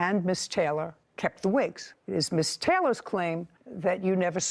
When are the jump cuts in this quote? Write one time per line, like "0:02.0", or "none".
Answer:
none